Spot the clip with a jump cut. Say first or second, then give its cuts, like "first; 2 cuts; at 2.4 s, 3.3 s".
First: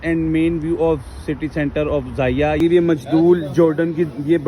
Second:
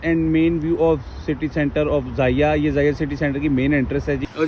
first; 1 cut; at 2.6 s